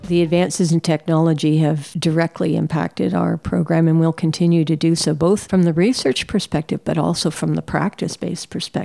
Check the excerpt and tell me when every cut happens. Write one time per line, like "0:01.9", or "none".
0:01.9
0:05.4